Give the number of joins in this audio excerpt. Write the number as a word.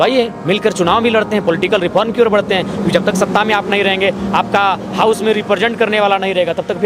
zero